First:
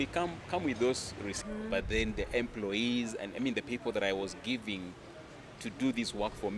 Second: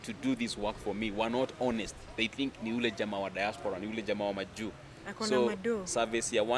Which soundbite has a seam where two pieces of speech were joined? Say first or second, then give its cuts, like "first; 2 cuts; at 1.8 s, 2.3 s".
first; 1 cut; at 1.4 s